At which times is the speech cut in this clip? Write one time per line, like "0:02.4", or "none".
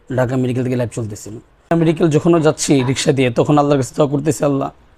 0:01.7